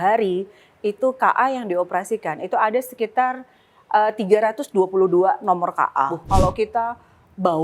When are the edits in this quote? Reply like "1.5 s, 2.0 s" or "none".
6.3 s